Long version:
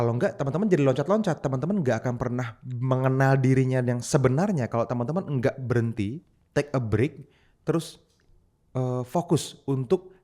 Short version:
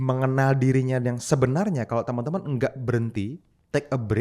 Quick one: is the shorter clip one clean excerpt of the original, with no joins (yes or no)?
yes